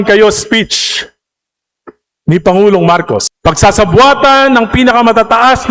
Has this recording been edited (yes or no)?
yes